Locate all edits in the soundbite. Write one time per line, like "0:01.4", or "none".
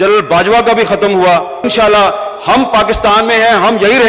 0:01.5

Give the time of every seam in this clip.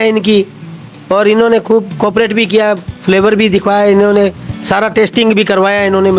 none

